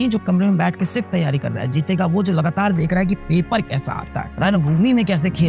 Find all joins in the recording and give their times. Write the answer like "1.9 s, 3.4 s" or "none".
none